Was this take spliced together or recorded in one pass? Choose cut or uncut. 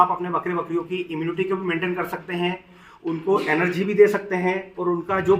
uncut